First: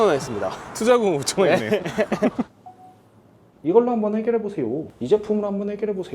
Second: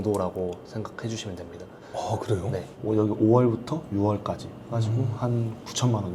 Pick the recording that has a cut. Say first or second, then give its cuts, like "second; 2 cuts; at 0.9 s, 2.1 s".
first; 1 cut; at 2.6 s